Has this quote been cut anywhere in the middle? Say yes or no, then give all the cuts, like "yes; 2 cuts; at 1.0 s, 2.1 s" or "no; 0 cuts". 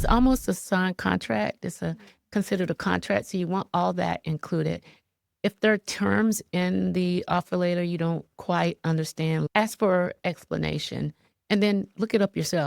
yes; 1 cut; at 9.5 s